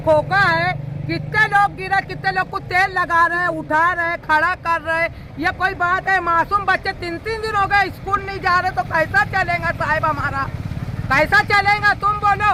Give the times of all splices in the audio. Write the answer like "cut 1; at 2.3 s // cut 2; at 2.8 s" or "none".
none

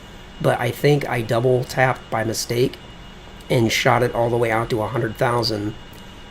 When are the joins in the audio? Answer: cut 1; at 2.4 s

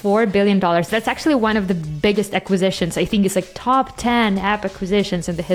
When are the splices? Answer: none

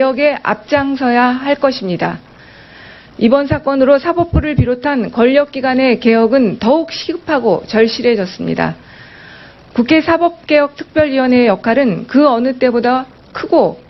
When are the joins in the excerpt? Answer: none

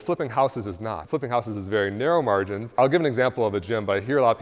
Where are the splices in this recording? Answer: cut 1; at 1.0 s // cut 2; at 2.8 s

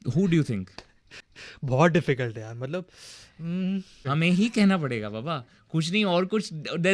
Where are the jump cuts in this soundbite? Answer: cut 1; at 4.0 s

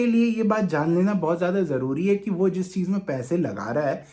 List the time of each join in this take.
none

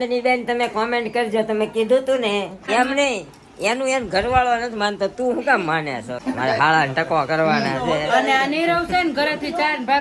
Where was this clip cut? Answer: cut 1; at 2.7 s // cut 2; at 6.1 s

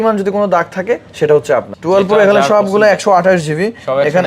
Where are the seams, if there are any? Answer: cut 1; at 1.7 s

